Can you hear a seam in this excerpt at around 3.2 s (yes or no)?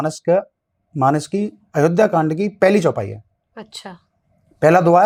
no